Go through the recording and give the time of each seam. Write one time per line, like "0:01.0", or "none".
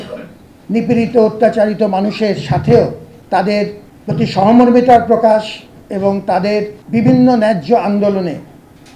0:03.1
0:03.9
0:06.8